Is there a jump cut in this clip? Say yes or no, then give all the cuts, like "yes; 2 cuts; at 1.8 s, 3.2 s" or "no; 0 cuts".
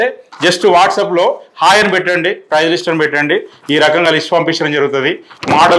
no; 0 cuts